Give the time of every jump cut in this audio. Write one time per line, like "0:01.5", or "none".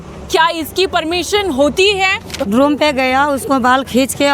0:02.4